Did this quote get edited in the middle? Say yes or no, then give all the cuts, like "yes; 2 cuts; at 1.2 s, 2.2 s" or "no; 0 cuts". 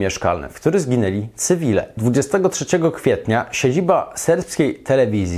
yes; 1 cut; at 1.9 s